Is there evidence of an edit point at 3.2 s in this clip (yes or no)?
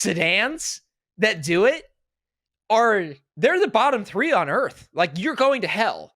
yes